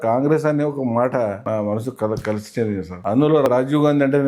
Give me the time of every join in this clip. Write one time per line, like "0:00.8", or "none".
0:01.4
0:03.4